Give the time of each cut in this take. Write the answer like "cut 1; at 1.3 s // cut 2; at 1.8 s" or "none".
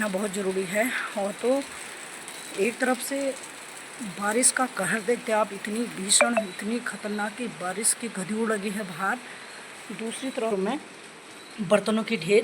cut 1; at 10.5 s